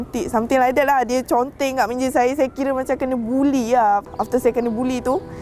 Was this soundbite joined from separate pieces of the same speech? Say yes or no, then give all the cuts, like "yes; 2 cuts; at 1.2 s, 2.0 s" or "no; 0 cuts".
yes; 1 cut; at 4.1 s